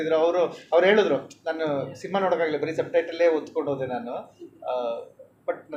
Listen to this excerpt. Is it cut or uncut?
uncut